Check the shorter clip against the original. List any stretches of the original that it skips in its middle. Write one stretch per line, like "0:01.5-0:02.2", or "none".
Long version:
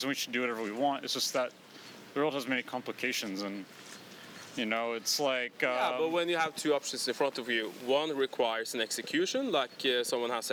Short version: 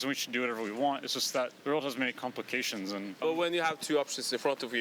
0:01.6-0:02.1
0:03.7-0:05.9